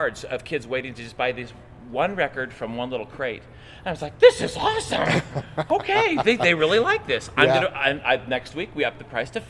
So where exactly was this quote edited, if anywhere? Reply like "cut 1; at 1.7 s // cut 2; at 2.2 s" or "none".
none

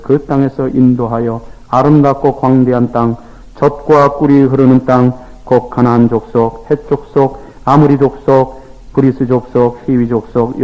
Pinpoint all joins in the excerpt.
none

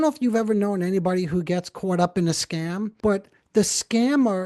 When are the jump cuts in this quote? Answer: cut 1; at 2.9 s

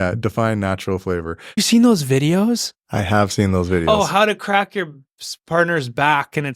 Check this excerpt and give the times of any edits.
cut 1; at 1.6 s

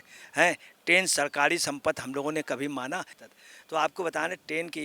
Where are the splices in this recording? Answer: cut 1; at 3.2 s

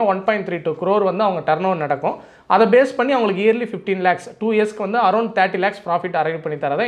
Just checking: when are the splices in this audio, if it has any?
none

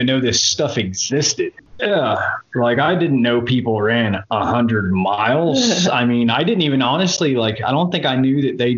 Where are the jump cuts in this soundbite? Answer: cut 1; at 1.5 s

